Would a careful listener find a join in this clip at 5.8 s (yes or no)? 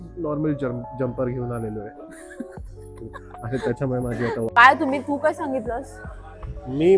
no